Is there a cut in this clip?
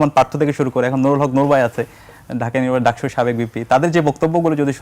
no; 0 cuts

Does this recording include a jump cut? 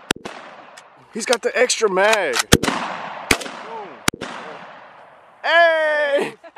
yes; 2 cuts; at 1.1 s, 2.4 s

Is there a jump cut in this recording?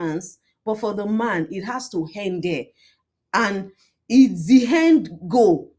no; 0 cuts

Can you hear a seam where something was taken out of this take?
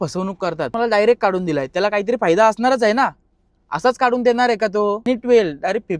yes; 2 cuts; at 0.7 s, 5.0 s

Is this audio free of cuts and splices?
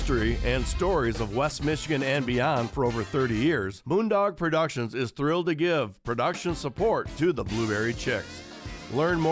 no; 1 cut; at 3.7 s

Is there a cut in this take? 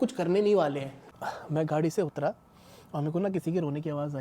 yes; 1 cut; at 1.0 s

